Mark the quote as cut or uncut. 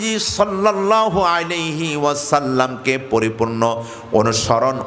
uncut